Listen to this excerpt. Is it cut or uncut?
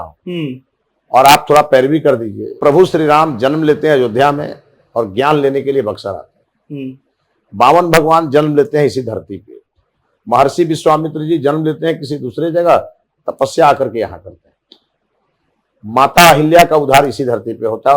cut